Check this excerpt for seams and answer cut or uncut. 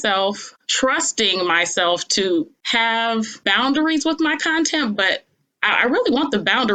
uncut